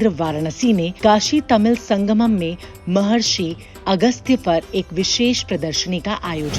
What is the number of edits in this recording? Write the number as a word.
one